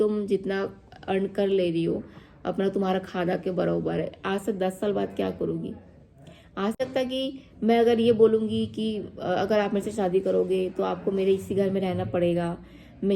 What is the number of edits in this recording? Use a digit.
1